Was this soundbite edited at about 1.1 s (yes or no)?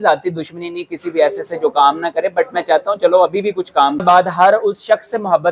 no